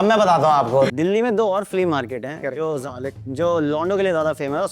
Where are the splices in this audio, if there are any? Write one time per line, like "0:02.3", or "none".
0:00.9